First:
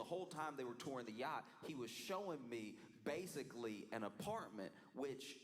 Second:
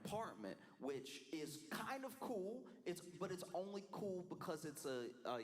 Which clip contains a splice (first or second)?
second